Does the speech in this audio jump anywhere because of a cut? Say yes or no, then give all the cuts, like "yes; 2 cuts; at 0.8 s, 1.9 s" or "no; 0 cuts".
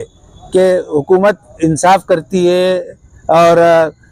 no; 0 cuts